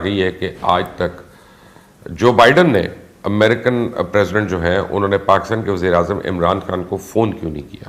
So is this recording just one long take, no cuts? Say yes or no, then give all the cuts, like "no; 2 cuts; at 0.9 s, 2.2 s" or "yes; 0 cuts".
yes; 0 cuts